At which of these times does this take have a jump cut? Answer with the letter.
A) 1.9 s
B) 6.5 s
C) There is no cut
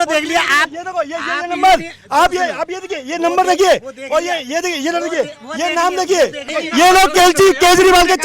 B